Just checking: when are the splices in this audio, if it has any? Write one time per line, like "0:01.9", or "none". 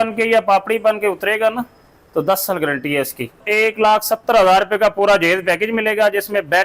0:03.4